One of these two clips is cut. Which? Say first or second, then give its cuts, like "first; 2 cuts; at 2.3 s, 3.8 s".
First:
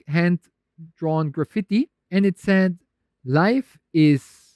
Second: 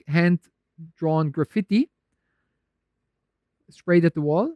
first; 1 cut; at 2.0 s